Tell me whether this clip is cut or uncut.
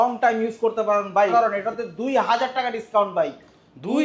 cut